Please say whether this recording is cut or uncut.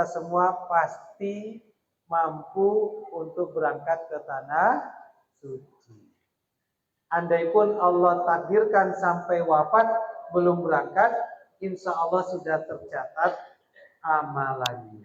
uncut